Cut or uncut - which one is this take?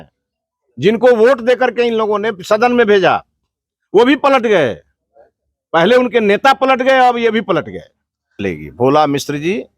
cut